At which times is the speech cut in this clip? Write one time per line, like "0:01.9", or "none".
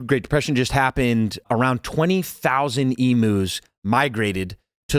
0:01.4